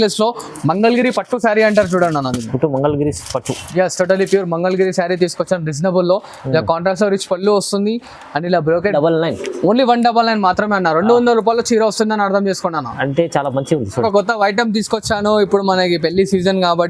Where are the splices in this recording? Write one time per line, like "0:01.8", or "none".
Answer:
0:08.9
0:14.0